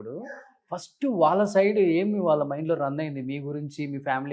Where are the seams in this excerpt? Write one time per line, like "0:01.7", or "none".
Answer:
none